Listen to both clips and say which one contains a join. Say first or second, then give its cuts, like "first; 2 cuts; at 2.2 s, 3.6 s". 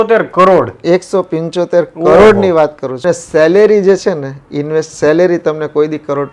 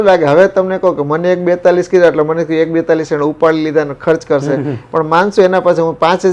first; 1 cut; at 3.0 s